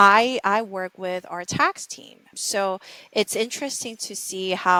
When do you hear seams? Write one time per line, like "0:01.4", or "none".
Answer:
none

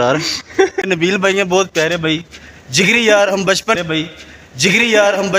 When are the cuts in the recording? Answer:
0:00.8
0:03.8

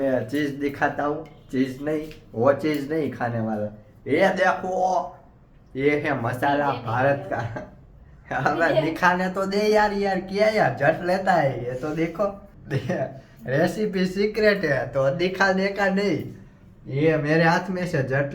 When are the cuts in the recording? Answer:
0:12.5

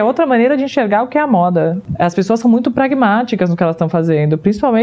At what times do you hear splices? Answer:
0:01.8

